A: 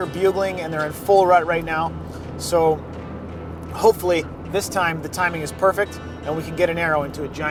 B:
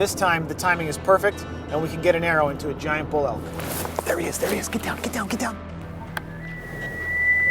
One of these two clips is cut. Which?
B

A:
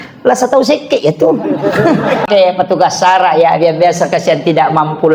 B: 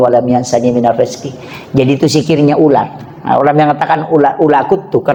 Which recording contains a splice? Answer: A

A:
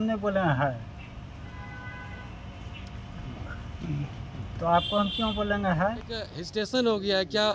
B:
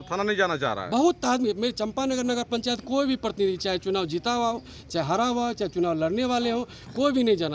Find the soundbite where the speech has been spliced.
A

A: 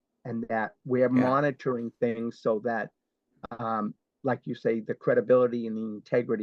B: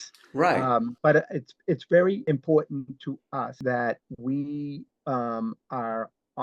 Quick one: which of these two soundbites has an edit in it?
B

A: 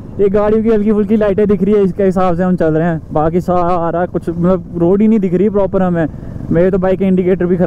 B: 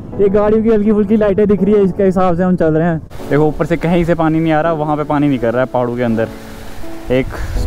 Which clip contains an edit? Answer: B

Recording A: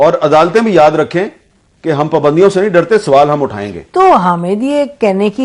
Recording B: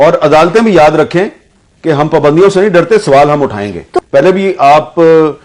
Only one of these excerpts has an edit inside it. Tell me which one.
B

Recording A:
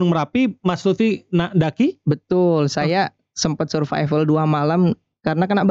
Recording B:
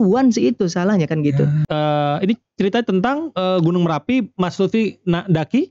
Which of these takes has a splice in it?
B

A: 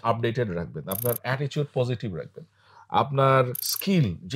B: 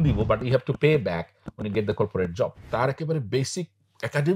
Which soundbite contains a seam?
B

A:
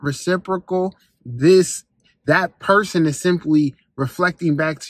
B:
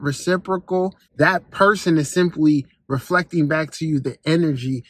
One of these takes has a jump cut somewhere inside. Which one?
B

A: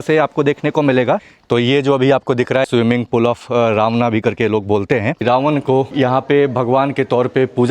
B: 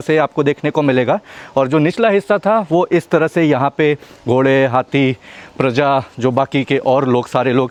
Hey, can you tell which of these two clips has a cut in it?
A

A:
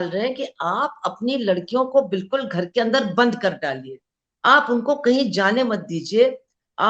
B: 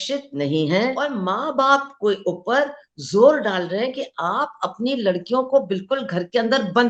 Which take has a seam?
B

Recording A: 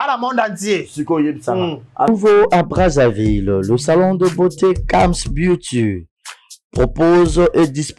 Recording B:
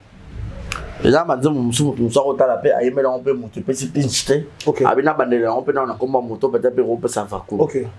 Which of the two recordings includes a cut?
A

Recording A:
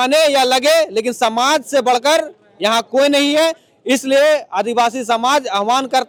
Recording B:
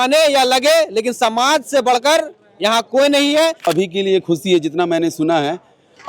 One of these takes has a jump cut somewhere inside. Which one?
B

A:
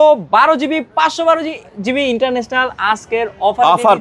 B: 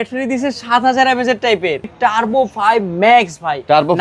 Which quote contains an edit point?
B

